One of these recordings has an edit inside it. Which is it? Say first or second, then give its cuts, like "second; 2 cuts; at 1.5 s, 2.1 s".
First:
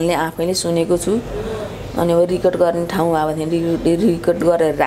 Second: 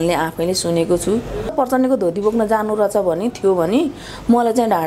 second; 1 cut; at 1.5 s